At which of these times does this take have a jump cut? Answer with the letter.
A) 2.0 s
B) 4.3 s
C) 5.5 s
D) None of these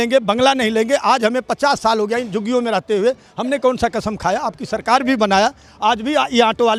D